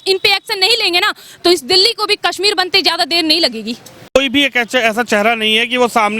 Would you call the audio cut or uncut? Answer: uncut